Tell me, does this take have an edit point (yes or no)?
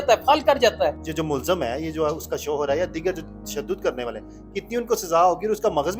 yes